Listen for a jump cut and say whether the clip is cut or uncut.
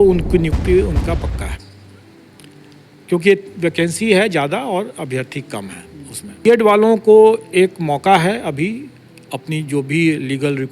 cut